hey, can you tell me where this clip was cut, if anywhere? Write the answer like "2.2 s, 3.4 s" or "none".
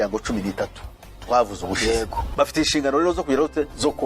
2.3 s